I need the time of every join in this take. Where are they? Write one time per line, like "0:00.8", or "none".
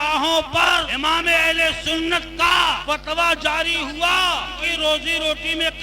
0:00.9
0:02.8
0:04.6